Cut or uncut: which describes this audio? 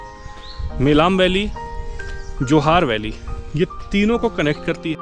uncut